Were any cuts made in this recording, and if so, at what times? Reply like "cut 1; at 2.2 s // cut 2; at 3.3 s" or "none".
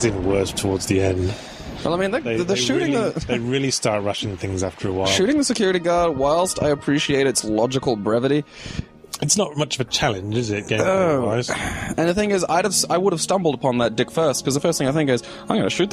cut 1; at 13.9 s